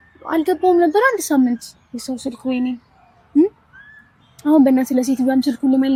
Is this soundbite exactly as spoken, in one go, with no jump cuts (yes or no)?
yes